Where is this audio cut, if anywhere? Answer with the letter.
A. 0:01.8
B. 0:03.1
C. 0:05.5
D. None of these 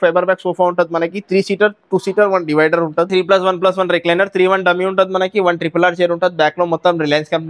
B